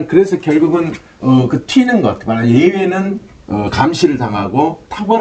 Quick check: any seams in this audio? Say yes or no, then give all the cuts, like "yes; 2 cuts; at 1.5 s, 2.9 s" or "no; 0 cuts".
no; 0 cuts